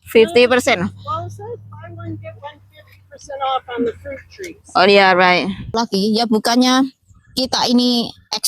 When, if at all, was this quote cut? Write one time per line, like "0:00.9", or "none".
0:05.7

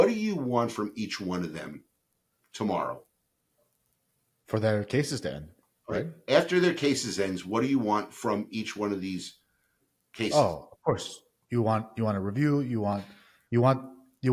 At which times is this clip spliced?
none

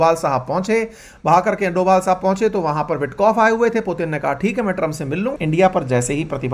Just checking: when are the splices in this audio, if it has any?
0:05.3

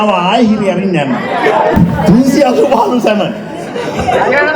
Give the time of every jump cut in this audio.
none

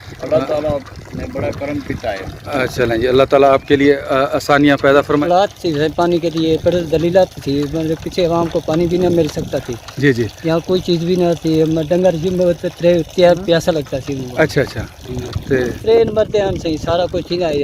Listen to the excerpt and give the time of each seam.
0:05.2
0:15.8

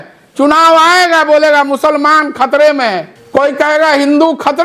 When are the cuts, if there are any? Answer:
0:03.1

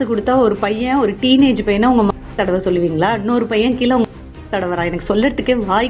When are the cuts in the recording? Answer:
none

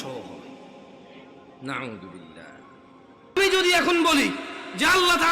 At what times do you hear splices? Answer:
0:03.1

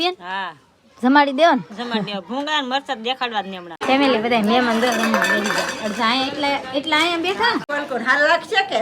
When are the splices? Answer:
0:03.8
0:07.7

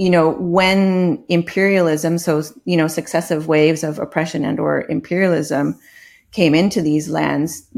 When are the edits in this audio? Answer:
none

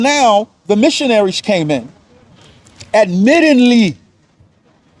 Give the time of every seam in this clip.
none

